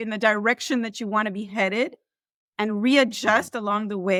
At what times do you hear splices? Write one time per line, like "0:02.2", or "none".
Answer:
none